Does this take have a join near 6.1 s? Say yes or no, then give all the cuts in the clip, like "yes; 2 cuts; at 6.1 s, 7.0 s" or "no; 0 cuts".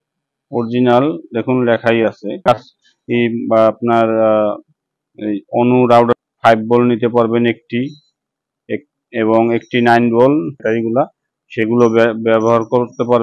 yes; 3 cuts; at 2.3 s, 6.1 s, 10.6 s